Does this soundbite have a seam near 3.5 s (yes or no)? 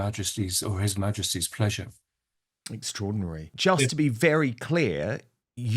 yes